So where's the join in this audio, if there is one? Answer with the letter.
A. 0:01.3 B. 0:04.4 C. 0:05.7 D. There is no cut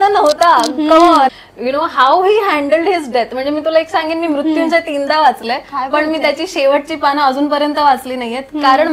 A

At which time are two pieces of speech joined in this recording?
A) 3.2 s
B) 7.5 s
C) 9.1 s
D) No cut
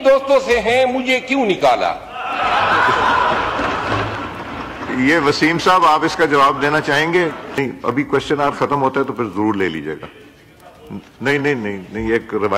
B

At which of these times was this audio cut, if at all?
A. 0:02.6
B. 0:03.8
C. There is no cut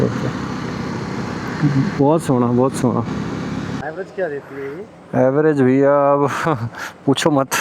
B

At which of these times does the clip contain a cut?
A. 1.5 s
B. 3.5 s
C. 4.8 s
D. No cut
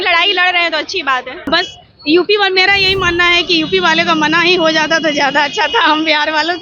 A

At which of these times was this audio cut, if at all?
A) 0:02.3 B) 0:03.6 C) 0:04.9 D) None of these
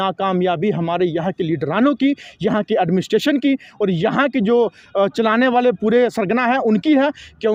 D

